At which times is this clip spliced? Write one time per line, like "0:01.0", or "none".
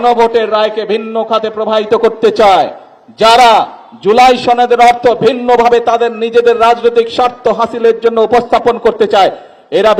none